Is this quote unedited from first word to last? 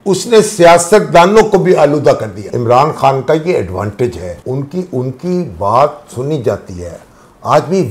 no; 2 cuts; at 2.5 s, 4.3 s

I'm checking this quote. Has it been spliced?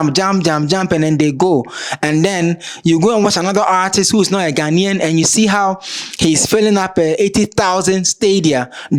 no; 0 cuts

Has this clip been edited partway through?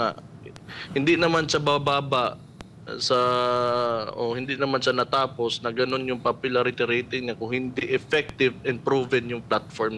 no; 0 cuts

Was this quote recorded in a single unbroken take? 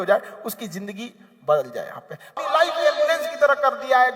no; 1 cut; at 2.3 s

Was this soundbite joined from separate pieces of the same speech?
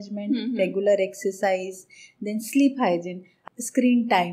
yes; 1 cut; at 3.3 s

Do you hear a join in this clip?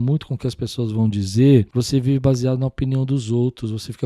yes; 1 cut; at 1.7 s

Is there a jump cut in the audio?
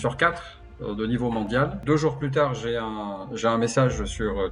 yes; 1 cut; at 1.8 s

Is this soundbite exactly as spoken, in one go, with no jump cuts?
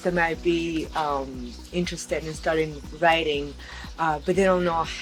yes; 0 cuts

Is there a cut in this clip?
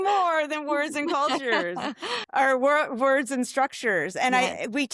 no; 0 cuts

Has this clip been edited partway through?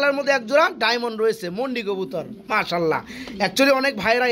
no; 0 cuts

